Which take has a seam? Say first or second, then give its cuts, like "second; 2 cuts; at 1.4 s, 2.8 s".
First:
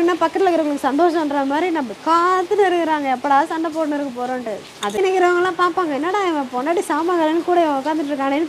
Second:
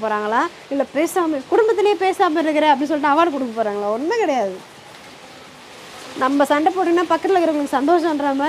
first; 1 cut; at 5.0 s